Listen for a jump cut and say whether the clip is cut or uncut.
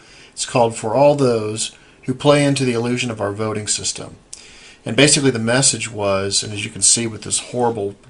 cut